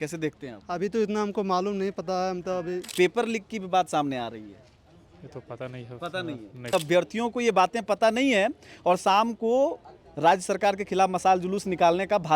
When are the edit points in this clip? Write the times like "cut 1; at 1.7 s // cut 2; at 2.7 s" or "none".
cut 1; at 2.8 s // cut 2; at 6.7 s